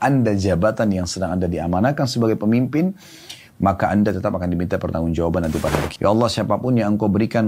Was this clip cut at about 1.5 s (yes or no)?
no